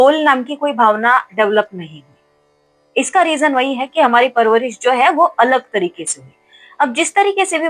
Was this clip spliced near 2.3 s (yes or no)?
no